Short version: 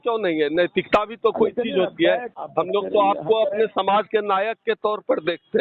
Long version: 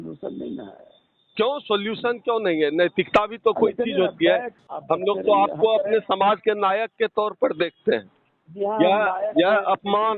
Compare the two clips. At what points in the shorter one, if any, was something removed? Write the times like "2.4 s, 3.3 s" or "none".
2.4 s